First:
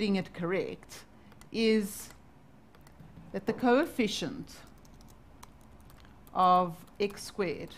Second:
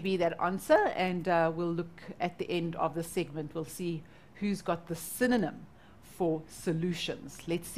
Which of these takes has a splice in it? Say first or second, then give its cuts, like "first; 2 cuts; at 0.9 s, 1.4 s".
first; 1 cut; at 4.4 s